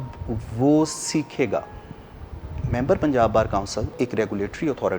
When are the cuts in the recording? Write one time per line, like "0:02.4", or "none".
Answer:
0:02.5
0:03.9